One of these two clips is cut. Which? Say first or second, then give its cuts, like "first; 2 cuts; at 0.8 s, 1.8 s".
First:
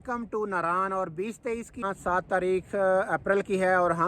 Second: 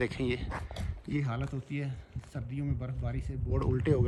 first; 1 cut; at 1.8 s